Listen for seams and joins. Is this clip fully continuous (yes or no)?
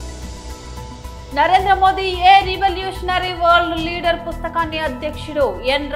yes